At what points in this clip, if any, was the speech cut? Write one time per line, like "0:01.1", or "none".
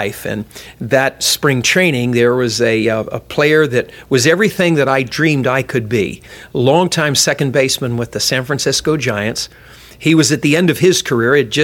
0:06.4